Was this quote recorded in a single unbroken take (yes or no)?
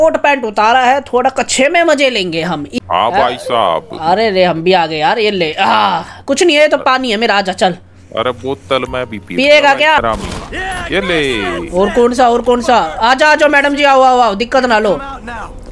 no